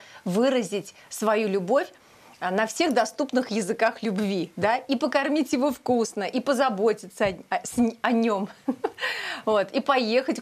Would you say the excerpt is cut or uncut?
uncut